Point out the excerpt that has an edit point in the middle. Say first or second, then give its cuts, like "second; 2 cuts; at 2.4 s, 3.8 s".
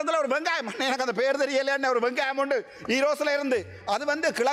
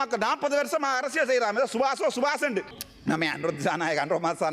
second; 1 cut; at 2.8 s